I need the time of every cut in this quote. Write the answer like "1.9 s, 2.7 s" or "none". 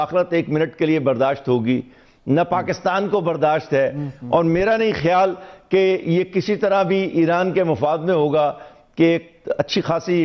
none